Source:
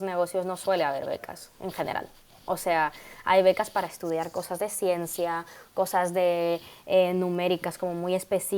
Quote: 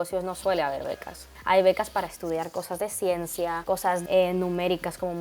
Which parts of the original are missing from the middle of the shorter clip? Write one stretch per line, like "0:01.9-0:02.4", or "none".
0:01.5-0:03.1
0:05.7-0:06.7